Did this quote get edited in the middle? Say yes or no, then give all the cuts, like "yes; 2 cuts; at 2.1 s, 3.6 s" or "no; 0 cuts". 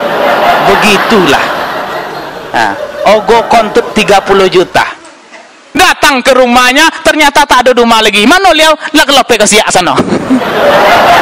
yes; 1 cut; at 5.8 s